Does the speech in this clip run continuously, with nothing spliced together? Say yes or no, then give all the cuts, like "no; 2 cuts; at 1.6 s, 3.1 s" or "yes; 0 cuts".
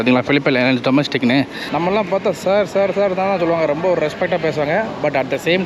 no; 1 cut; at 1.6 s